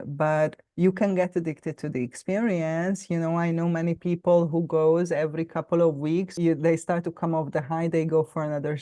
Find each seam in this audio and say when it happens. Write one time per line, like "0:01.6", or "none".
0:06.3